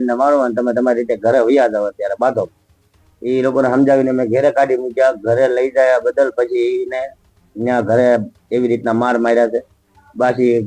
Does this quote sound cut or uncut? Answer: uncut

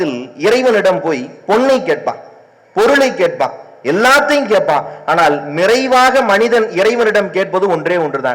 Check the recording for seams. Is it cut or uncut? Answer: uncut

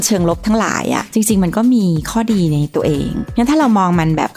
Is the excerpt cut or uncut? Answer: cut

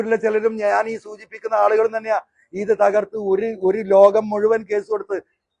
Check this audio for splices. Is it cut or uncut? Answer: uncut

